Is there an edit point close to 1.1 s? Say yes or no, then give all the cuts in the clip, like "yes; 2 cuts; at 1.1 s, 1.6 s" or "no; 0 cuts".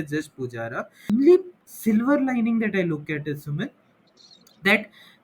yes; 1 cut; at 1.1 s